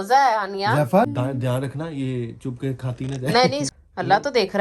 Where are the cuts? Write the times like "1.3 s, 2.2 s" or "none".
1.1 s, 3.7 s